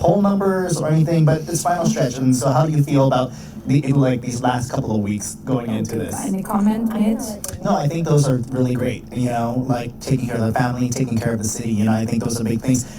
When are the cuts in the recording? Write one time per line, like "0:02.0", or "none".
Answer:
0:06.0